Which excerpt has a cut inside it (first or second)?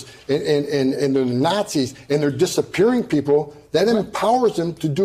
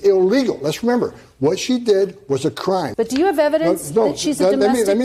second